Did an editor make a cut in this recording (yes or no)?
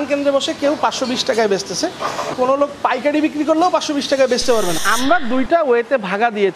yes